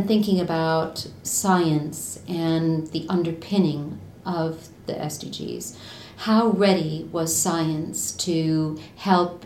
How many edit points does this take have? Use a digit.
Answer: 0